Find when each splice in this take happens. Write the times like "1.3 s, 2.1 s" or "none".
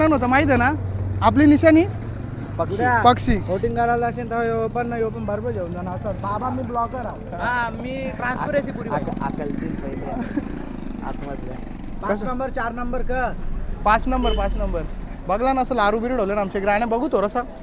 none